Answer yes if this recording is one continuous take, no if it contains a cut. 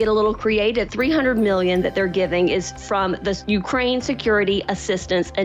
no